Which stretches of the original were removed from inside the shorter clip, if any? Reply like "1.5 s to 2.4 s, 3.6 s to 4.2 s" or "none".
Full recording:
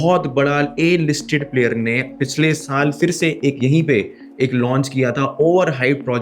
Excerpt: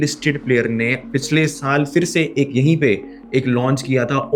none